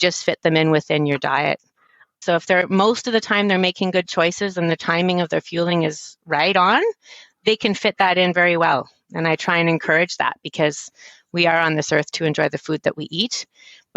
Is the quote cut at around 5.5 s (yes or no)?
no